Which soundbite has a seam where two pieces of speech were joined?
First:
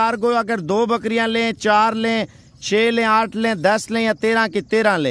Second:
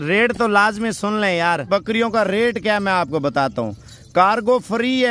second; 1 cut; at 1.7 s

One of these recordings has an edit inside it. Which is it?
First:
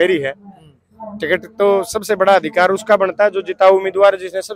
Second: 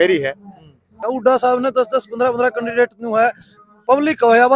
second; 1 cut; at 1.0 s

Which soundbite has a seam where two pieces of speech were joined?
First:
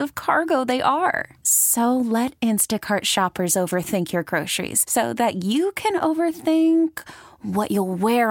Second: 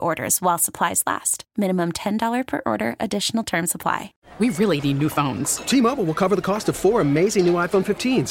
second; 1 cut; at 4.2 s

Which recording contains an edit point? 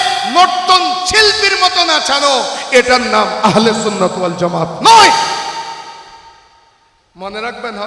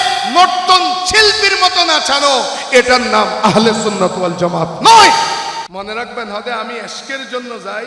second; 1 cut; at 5.7 s

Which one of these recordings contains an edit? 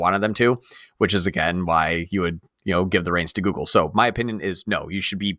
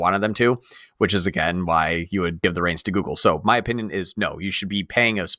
second; 1 cut; at 2.4 s

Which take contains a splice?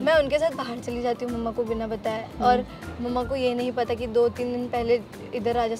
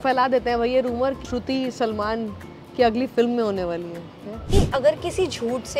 second; 2 cuts; at 1.2 s, 4.5 s

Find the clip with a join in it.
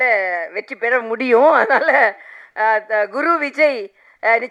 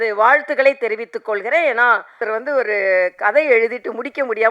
second; 1 cut; at 2.2 s

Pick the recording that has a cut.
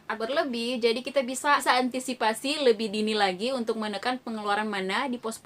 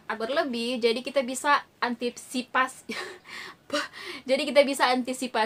first; 1 cut; at 1.6 s

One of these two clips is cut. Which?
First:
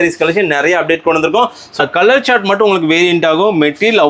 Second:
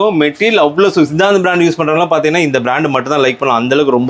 first; 1 cut; at 1.8 s

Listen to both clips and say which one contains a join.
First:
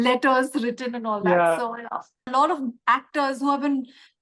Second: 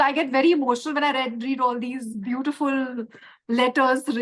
first; 1 cut; at 2.2 s

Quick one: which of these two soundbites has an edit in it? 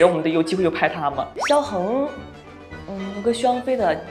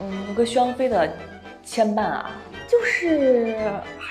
first; 1 cut; at 1.4 s

